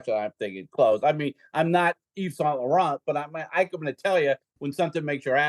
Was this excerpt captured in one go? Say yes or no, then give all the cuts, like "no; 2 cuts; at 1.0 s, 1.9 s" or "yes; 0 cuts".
yes; 0 cuts